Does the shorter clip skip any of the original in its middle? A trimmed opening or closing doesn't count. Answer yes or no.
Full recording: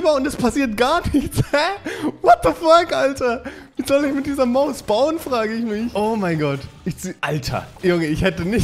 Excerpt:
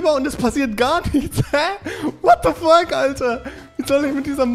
no